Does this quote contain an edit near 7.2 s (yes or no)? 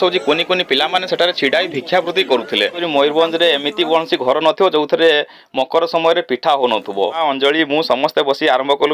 yes